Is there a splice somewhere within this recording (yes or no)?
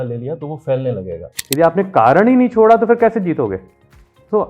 yes